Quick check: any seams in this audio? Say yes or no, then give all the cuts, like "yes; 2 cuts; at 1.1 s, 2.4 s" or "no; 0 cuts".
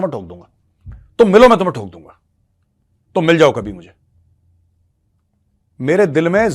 no; 0 cuts